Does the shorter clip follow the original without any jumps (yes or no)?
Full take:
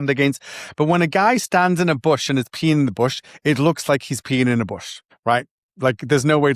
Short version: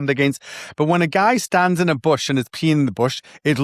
yes